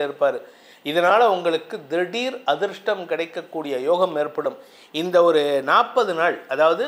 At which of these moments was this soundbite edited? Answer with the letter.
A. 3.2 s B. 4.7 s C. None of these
C